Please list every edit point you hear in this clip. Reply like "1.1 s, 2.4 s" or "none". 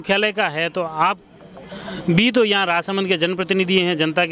none